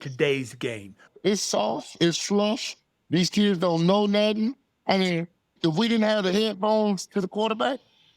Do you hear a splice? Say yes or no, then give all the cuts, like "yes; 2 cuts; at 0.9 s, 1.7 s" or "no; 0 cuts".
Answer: yes; 2 cuts; at 1.0 s, 5.5 s